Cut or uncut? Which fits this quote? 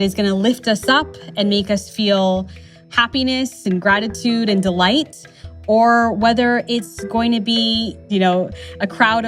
cut